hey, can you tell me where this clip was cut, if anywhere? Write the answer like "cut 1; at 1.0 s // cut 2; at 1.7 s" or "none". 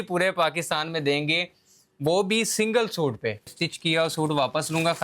cut 1; at 3.5 s